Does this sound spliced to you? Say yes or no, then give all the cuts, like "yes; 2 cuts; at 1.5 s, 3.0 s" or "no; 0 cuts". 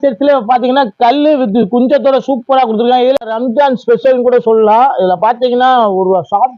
yes; 1 cut; at 3.2 s